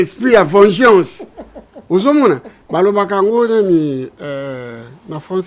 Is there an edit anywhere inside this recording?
no; 0 cuts

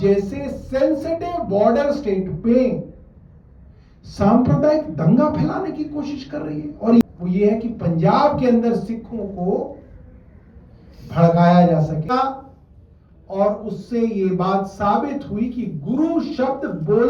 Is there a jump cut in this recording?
yes; 2 cuts; at 7.0 s, 12.1 s

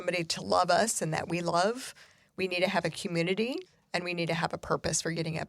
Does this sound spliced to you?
yes; 1 cut; at 3.7 s

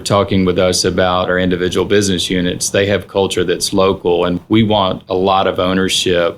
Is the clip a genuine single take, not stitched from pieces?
no; 2 cuts; at 1.3 s, 4.4 s

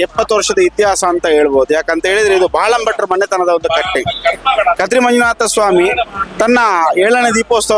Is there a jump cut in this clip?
no; 0 cuts

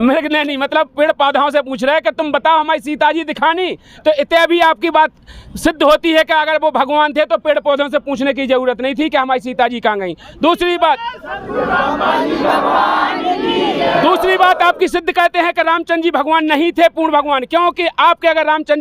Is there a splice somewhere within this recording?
no; 0 cuts

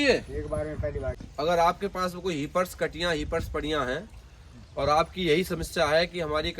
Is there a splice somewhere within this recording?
yes; 1 cut; at 1.1 s

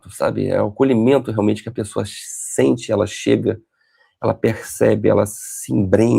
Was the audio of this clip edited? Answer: no; 0 cuts

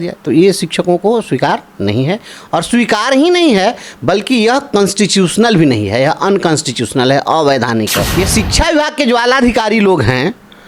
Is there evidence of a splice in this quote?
yes; 1 cut; at 8.0 s

